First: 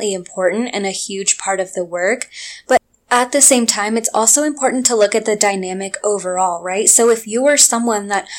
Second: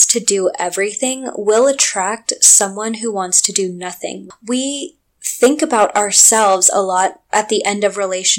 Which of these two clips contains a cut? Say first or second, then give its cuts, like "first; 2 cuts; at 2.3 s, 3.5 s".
second; 1 cut; at 4.2 s